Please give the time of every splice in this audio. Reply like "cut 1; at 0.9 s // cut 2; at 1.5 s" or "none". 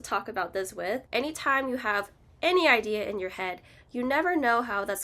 cut 1; at 1.0 s